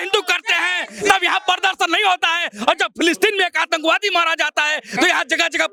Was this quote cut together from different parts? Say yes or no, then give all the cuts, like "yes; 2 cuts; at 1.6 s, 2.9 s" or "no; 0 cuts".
no; 0 cuts